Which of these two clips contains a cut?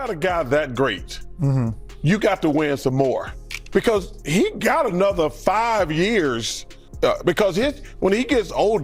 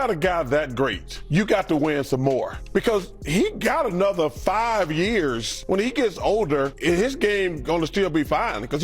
second; 4 cuts; at 1.1 s, 2.6 s, 5.5 s, 6.8 s

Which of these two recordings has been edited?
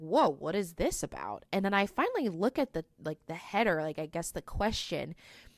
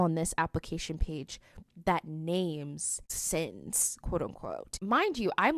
second; 2 cuts; at 3.2 s, 4.8 s

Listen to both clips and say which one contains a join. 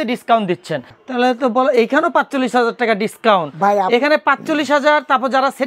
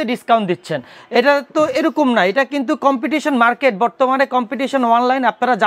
first; 1 cut; at 0.9 s

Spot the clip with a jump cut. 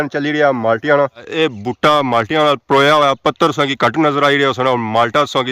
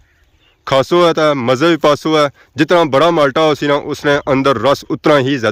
first; 1 cut; at 1.2 s

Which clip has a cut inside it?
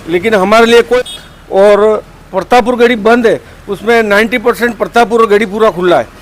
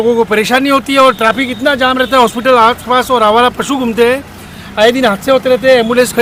first; 1 cut; at 1.0 s

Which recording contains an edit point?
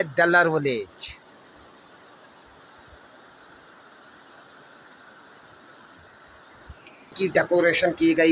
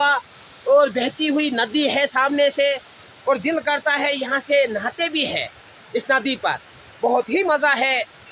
first; 1 cut; at 7.1 s

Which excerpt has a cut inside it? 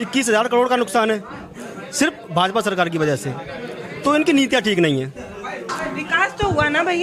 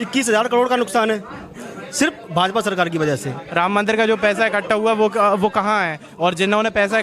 second; 1 cut; at 3.4 s

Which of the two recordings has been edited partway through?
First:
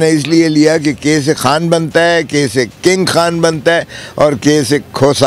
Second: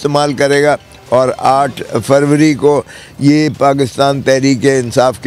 first; 2 cuts; at 1.4 s, 2.7 s

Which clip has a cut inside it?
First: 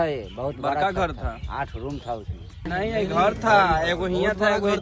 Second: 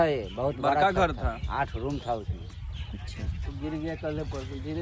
first; 1 cut; at 2.7 s

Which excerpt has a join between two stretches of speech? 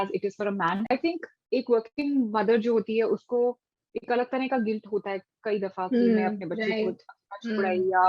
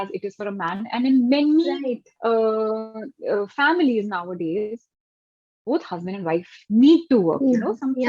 first; 1 cut; at 0.9 s

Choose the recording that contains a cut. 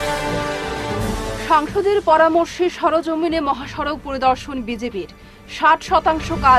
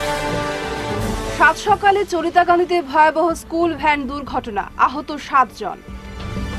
second; 1 cut; at 1.0 s

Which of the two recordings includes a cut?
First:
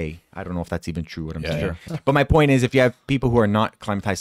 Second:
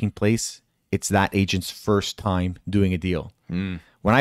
first; 1 cut; at 1.9 s

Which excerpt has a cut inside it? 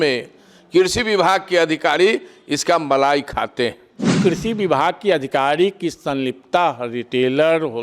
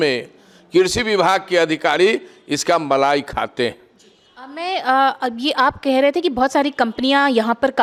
first; 1 cut; at 4.2 s

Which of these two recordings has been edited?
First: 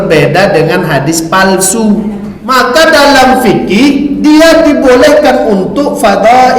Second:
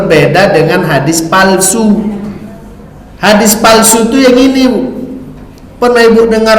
first; 1 cut; at 2.3 s

